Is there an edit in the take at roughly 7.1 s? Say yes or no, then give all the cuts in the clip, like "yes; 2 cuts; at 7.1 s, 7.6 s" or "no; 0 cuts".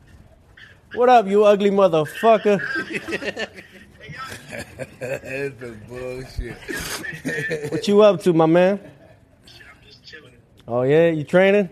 no; 0 cuts